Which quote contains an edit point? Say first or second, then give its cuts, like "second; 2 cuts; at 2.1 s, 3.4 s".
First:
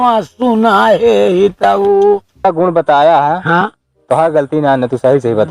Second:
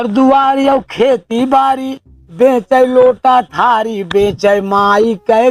first; 1 cut; at 2.4 s